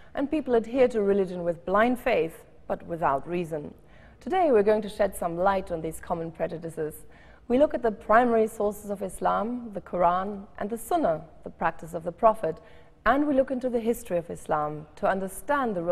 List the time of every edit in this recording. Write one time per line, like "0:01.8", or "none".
0:11.4